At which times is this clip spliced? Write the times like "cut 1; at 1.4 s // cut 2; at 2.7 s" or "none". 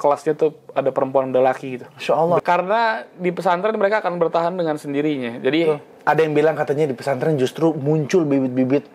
cut 1; at 2.4 s // cut 2; at 5.9 s